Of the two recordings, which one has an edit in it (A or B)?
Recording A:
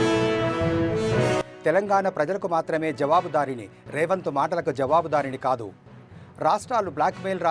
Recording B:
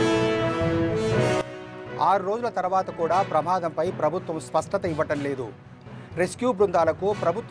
A